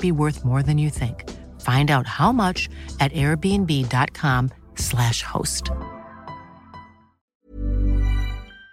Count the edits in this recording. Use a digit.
1